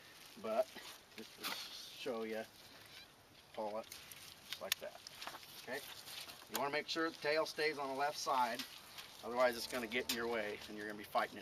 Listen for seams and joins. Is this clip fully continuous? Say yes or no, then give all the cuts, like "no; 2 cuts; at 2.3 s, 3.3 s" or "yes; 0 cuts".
no; 1 cut; at 4.2 s